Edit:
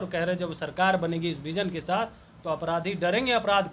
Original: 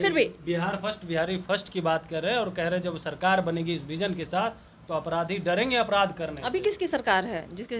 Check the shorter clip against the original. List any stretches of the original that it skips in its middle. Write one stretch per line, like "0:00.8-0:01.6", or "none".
none